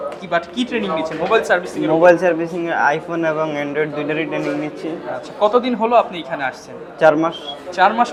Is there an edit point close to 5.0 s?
no; 0 cuts

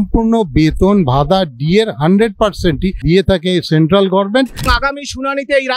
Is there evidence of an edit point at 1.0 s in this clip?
no; 2 cuts; at 3.0 s, 4.7 s

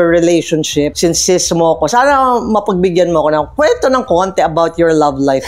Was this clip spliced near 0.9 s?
yes; 1 cut; at 0.9 s

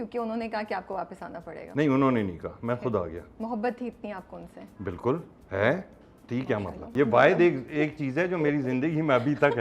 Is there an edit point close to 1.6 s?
yes; 2 cuts; at 1.6 s, 6.9 s

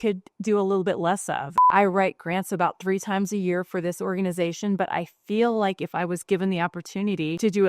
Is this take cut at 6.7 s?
no; 1 cut; at 1.6 s

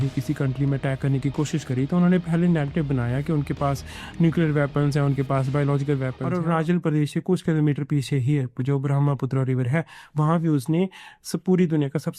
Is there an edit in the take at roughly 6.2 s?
yes; 1 cut; at 6.2 s

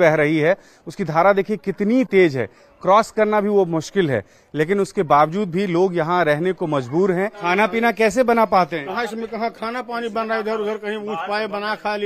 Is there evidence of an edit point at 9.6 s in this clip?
no; 1 cut; at 7.4 s

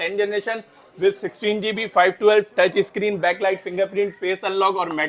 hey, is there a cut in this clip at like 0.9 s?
no; 0 cuts

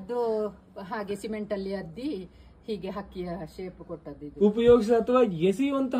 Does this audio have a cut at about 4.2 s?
yes; 1 cut; at 4.2 s

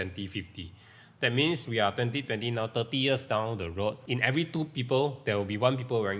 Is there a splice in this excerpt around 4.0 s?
yes; 1 cut; at 4.0 s

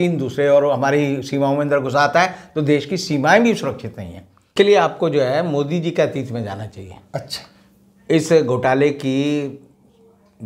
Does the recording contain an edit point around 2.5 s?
no; 1 cut; at 4.5 s

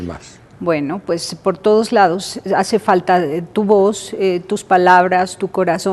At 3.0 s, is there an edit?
yes; 1 cut; at 3.0 s

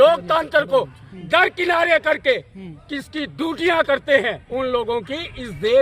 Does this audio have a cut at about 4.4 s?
yes; 1 cut; at 4.4 s

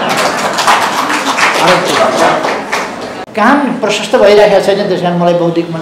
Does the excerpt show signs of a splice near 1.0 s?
no; 1 cut; at 3.1 s

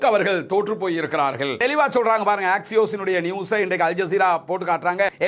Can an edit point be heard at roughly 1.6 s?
yes; 1 cut; at 1.6 s

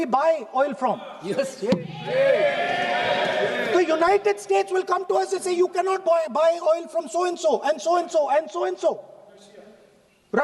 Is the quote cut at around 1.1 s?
no; 0 cuts

